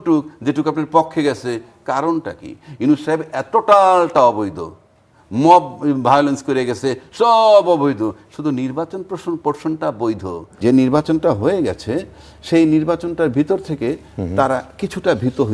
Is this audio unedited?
no; 1 cut; at 10.4 s

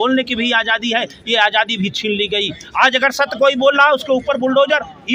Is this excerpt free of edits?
yes; 0 cuts

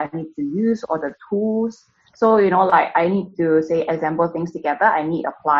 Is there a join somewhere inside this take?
no; 0 cuts

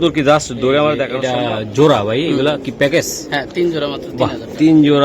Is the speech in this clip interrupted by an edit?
yes; 1 cut; at 1.1 s

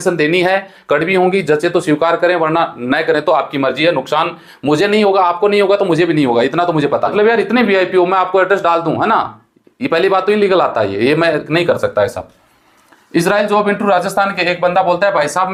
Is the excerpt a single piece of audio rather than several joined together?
yes; 0 cuts

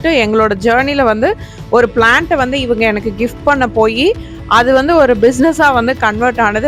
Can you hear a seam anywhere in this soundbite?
no; 0 cuts

